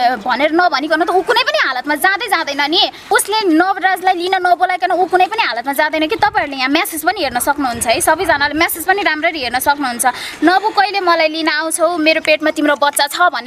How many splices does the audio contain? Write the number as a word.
one